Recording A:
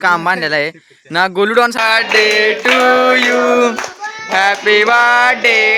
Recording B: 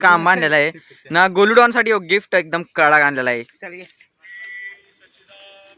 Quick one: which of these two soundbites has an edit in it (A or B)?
A